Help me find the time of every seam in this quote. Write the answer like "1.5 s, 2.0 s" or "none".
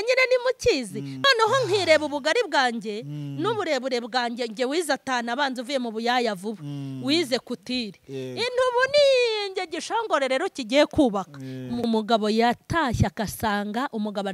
1.1 s, 11.8 s

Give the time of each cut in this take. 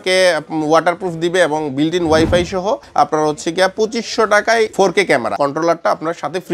2.8 s, 5.3 s

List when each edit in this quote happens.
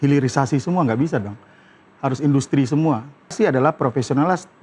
3.3 s

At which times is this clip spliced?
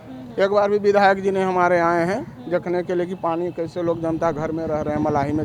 none

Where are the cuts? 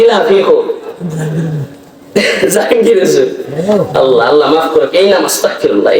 none

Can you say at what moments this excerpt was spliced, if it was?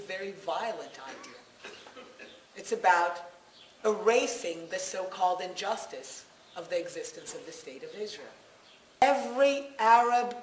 9.0 s

